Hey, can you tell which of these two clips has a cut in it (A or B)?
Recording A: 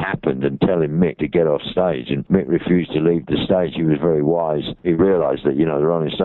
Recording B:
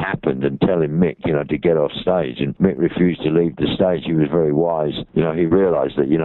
A